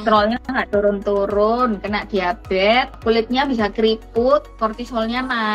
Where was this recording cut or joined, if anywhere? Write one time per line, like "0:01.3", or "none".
0:03.0
0:04.5